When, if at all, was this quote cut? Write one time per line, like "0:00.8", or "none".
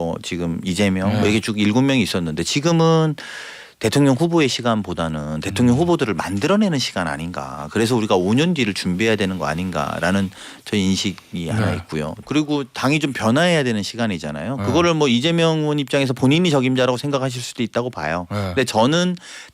0:12.2